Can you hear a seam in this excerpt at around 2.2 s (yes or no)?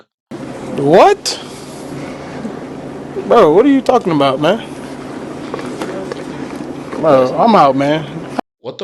no